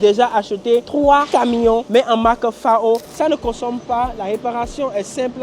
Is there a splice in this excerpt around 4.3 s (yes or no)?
no